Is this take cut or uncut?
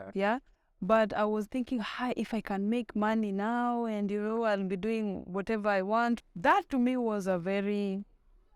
cut